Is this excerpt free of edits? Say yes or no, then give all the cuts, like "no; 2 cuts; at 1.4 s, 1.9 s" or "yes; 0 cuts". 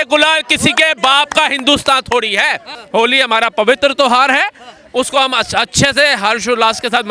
no; 1 cut; at 2.8 s